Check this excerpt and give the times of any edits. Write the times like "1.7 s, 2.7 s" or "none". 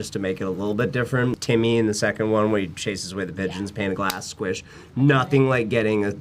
1.4 s